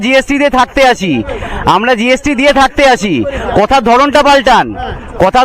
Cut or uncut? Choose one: uncut